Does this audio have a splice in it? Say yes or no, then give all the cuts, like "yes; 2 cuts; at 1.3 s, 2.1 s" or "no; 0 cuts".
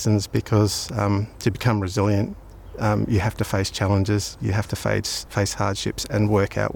no; 0 cuts